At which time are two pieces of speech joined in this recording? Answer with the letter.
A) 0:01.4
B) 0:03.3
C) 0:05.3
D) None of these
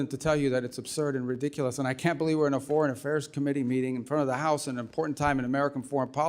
D